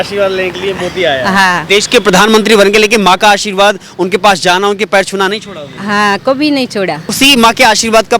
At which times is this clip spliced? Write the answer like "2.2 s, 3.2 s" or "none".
1.6 s, 7.1 s